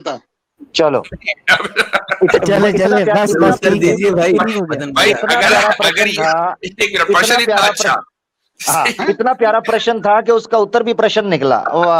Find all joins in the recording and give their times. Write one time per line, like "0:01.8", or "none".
none